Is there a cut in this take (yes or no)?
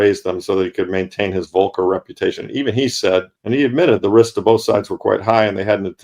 yes